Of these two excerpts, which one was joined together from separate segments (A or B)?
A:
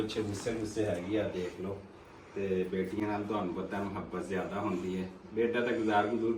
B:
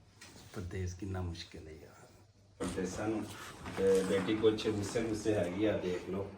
B